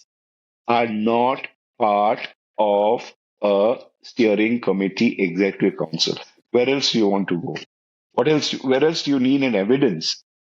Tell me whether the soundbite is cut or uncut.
uncut